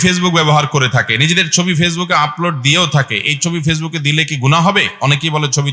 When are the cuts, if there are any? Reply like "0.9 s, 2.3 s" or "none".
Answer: none